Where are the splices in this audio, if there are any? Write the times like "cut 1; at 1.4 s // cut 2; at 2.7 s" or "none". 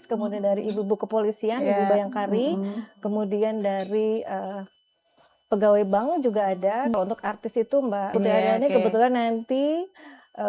cut 1; at 6.9 s // cut 2; at 8.1 s

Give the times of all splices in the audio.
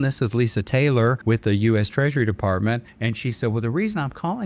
cut 1; at 1.2 s // cut 2; at 2.9 s

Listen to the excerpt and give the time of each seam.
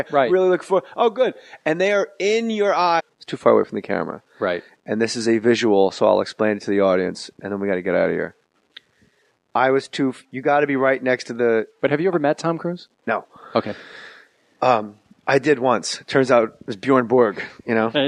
none

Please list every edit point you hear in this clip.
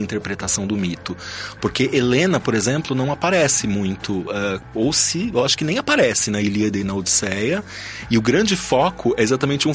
none

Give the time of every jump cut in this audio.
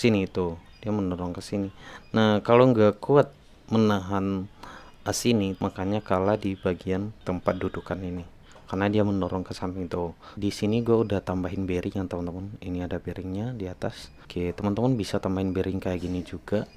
cut 1; at 5.6 s // cut 2; at 7.1 s // cut 3; at 10.3 s // cut 4; at 14.1 s

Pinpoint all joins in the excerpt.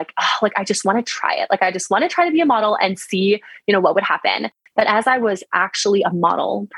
cut 1; at 4.5 s

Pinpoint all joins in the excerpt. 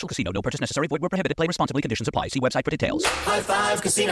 none

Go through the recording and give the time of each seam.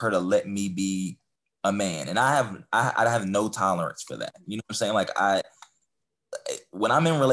none

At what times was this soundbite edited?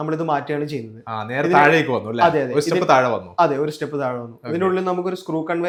none

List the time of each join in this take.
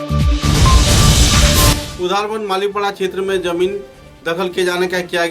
cut 1; at 1.8 s

